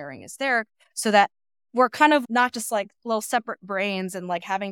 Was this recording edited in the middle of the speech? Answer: no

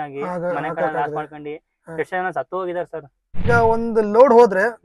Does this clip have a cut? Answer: yes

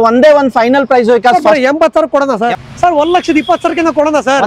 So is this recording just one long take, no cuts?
no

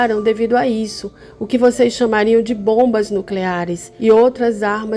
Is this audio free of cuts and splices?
yes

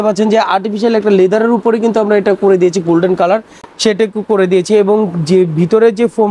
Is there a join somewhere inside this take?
no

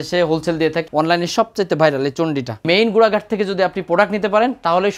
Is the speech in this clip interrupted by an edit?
yes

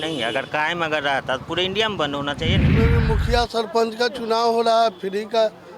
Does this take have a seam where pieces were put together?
yes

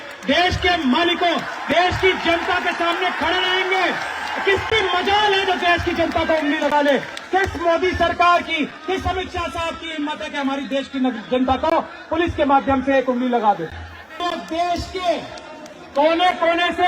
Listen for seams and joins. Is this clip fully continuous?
no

